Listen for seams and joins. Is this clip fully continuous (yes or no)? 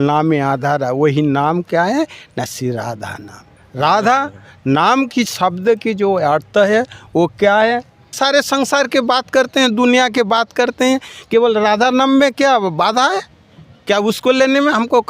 no